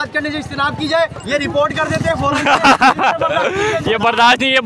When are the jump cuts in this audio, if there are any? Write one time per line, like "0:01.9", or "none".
0:03.4

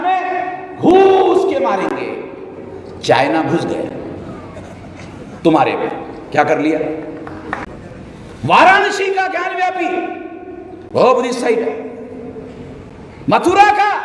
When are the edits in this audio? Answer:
0:07.7

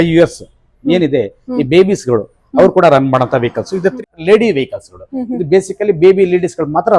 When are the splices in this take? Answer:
0:04.0

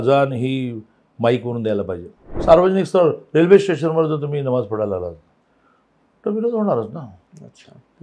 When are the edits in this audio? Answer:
0:02.3

